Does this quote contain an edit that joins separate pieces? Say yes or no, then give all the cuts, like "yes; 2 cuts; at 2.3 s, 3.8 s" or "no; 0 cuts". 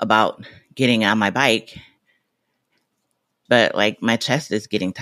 yes; 1 cut; at 3.4 s